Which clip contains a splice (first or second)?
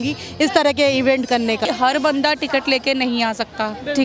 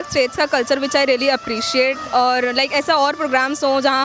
first